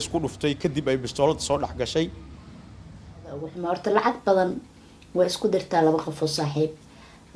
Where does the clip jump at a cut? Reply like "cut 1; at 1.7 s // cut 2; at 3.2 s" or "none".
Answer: cut 1; at 3.6 s